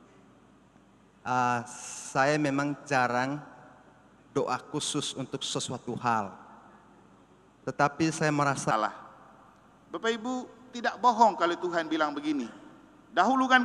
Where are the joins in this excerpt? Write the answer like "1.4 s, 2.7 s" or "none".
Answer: 8.7 s

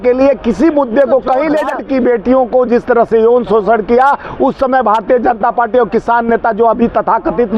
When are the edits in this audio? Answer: 1.8 s

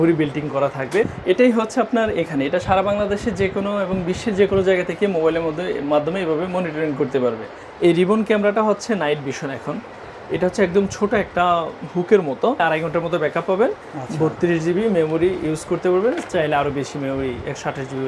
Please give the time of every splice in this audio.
1.1 s, 7.5 s, 12.6 s

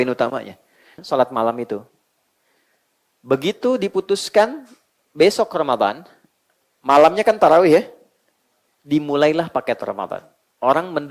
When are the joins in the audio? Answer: 1.0 s

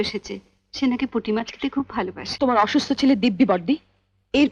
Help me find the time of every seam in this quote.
2.2 s

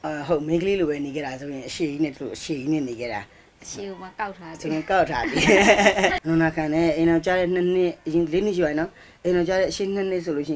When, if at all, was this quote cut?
6.2 s

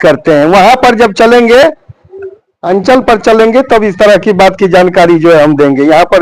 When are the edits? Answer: none

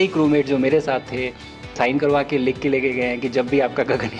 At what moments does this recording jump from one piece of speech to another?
1.7 s

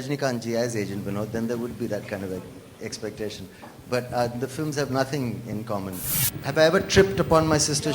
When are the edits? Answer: 6.1 s

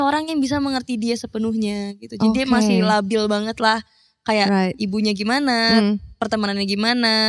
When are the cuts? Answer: none

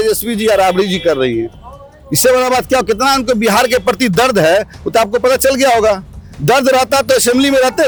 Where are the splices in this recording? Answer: none

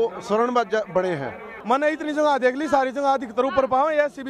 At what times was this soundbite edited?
1.5 s

